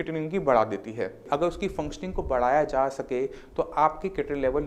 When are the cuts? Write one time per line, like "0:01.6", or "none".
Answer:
0:01.2